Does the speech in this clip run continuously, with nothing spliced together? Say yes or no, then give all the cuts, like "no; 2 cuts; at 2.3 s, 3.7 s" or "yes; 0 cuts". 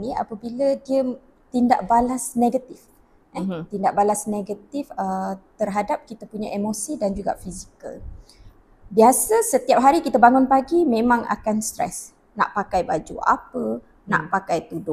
yes; 0 cuts